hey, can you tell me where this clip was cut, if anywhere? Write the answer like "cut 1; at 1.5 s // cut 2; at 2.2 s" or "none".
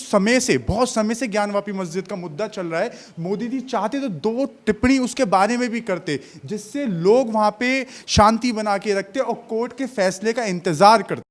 none